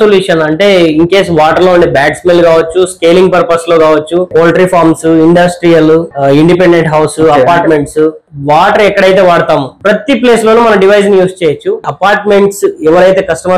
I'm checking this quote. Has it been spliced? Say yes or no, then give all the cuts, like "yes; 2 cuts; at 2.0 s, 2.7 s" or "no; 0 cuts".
yes; 5 cuts; at 4.3 s, 6.1 s, 8.2 s, 9.7 s, 11.8 s